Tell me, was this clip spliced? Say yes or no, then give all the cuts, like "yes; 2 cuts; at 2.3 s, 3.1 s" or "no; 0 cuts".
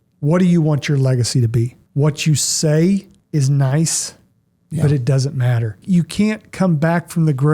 yes; 3 cuts; at 1.8 s, 3.2 s, 5.8 s